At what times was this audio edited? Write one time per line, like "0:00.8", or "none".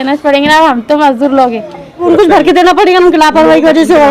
0:02.0